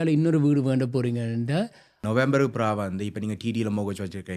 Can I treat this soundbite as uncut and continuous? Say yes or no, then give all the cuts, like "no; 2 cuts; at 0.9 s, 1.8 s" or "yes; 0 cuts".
no; 1 cut; at 1.9 s